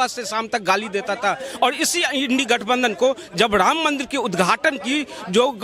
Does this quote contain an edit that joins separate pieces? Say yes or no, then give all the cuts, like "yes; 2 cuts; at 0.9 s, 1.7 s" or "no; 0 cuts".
no; 0 cuts